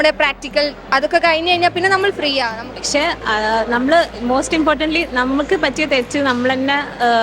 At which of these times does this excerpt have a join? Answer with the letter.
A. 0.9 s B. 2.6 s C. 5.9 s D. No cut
B